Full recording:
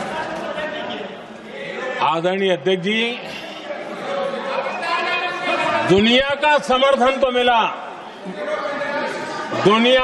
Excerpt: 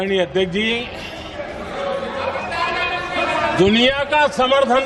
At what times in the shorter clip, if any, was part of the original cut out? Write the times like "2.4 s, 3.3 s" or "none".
none